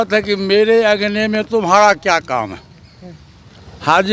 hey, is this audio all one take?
yes; 0 cuts

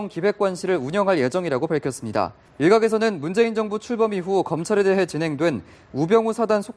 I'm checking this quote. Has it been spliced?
no; 0 cuts

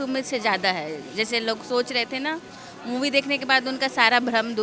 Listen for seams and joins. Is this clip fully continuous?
yes; 0 cuts

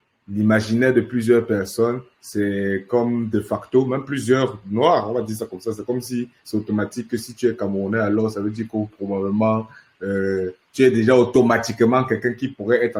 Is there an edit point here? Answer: no; 0 cuts

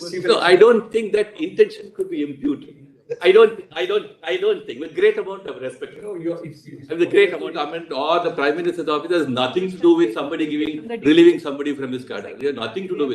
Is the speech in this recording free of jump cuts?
no; 1 cut; at 7.5 s

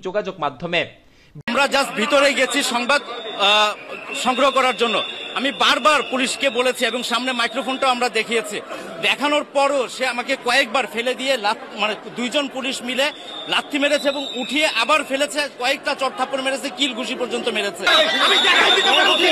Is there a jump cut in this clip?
yes; 2 cuts; at 1.4 s, 17.8 s

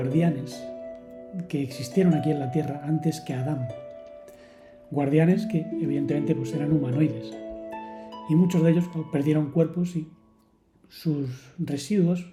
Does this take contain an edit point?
no; 0 cuts

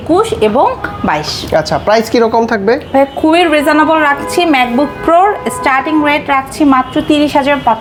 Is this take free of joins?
yes; 0 cuts

